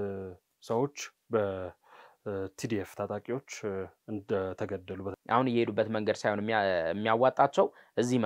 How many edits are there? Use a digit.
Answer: 1